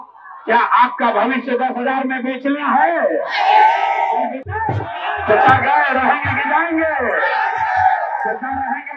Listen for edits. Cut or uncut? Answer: cut